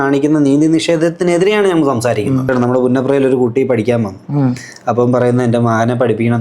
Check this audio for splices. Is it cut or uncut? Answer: cut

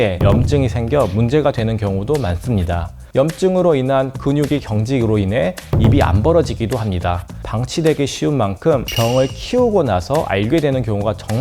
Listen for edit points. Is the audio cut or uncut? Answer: cut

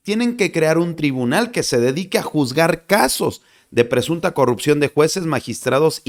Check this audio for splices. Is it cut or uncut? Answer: uncut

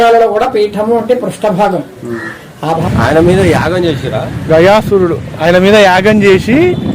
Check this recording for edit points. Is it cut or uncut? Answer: cut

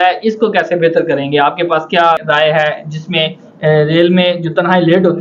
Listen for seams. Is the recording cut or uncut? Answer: cut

